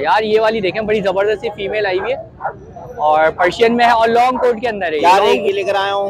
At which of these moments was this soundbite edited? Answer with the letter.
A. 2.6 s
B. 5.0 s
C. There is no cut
B